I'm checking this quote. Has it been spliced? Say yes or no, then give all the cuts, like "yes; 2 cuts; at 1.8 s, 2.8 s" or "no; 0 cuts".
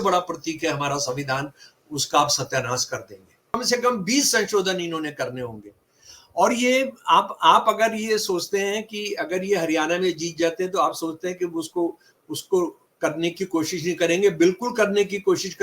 yes; 1 cut; at 3.5 s